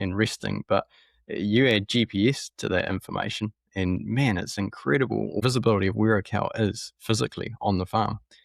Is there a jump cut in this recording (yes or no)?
yes